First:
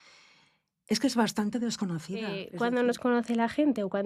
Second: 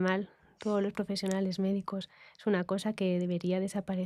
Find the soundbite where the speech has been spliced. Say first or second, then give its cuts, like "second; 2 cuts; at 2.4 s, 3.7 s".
first; 1 cut; at 2.4 s